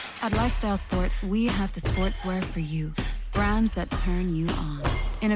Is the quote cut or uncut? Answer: uncut